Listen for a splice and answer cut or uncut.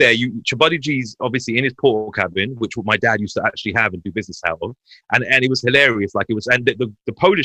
uncut